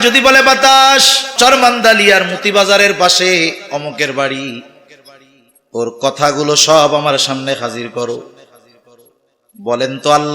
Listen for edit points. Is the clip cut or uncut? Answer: cut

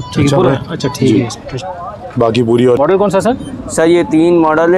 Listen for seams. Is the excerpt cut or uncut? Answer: cut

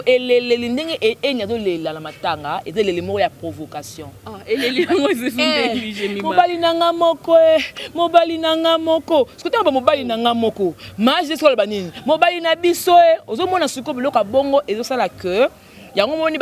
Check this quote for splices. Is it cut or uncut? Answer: uncut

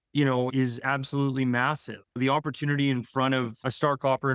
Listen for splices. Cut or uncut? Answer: uncut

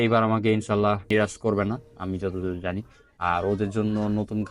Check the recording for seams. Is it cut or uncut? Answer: cut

